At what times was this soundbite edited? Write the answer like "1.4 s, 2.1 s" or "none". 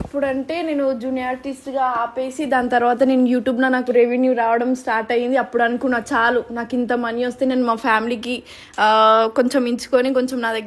none